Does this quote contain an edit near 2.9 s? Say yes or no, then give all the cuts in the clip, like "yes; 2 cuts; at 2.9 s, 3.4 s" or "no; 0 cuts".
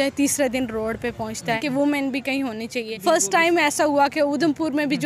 yes; 2 cuts; at 1.6 s, 2.9 s